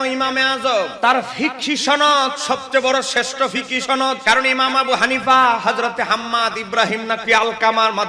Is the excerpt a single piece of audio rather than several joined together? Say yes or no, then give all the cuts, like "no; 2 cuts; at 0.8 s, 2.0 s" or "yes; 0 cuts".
no; 2 cuts; at 0.9 s, 4.2 s